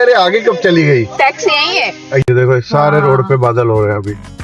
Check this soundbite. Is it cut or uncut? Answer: cut